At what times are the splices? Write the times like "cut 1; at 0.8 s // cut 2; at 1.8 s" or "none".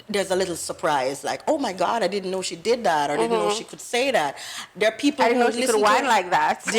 none